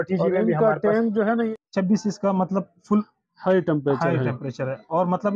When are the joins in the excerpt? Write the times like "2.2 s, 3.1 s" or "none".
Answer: 1.3 s